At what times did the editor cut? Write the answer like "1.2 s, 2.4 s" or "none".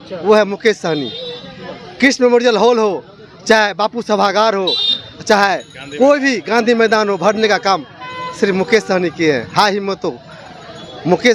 none